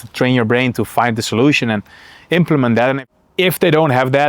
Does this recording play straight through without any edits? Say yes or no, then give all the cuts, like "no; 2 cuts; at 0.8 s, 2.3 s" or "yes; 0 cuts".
no; 1 cut; at 3.0 s